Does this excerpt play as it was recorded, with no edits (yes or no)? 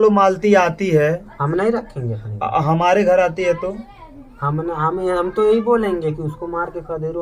yes